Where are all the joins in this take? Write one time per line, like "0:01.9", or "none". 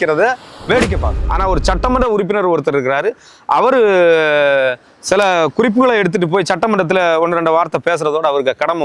0:01.2